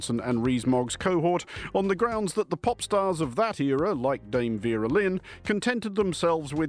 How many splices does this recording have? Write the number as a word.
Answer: one